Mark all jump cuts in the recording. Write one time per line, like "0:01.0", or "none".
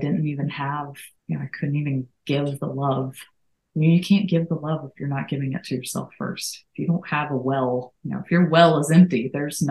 0:01.1
0:08.0